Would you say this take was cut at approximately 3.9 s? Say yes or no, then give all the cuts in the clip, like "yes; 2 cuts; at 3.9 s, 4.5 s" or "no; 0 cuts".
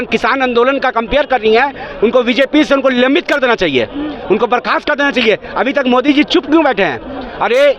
no; 0 cuts